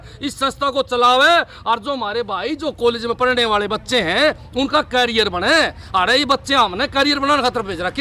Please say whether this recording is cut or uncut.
uncut